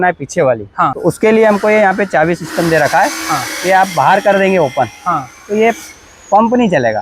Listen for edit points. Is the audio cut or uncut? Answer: cut